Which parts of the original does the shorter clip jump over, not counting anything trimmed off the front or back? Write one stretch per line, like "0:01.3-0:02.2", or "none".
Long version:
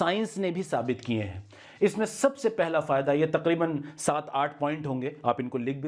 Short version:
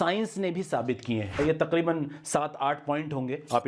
0:01.4-0:03.1